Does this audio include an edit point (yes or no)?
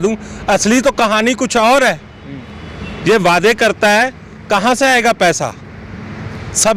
no